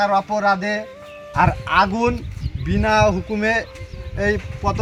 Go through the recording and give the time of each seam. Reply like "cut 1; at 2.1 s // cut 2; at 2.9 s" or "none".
none